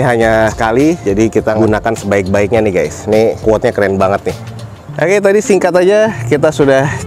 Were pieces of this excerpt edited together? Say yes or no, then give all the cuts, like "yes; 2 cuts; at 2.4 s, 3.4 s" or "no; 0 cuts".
no; 0 cuts